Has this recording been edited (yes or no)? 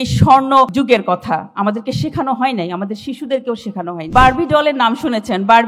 yes